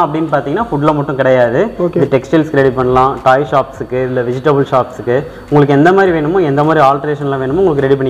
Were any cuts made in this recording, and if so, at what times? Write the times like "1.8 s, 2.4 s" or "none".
none

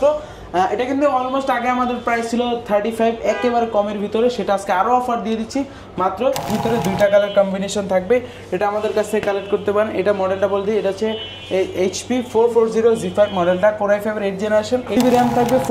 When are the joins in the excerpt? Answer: 6.5 s, 15.0 s

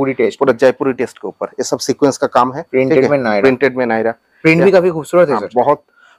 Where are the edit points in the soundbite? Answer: 2.6 s

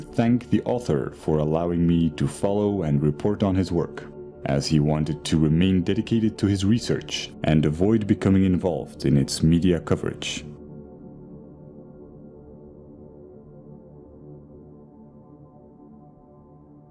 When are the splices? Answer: 8.9 s

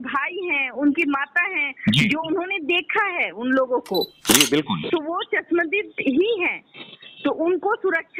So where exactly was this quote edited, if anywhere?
none

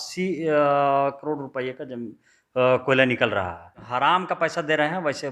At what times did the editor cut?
3.8 s

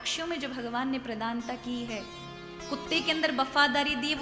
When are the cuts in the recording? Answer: none

